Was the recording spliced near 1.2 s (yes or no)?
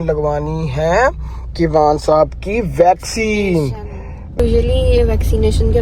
no